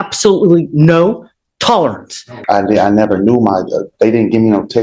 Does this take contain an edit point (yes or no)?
yes